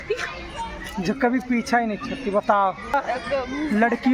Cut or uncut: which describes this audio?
cut